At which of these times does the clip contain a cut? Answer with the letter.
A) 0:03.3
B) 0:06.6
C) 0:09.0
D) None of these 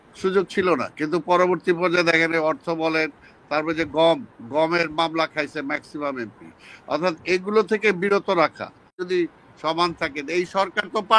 C